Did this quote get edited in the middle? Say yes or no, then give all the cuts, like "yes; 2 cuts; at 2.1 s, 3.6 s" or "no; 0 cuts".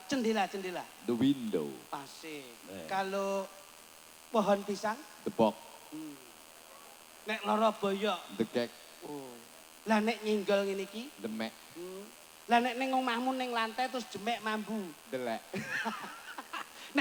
no; 0 cuts